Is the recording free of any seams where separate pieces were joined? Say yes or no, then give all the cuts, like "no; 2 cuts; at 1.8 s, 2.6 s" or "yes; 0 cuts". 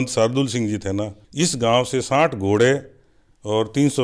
no; 1 cut; at 1.2 s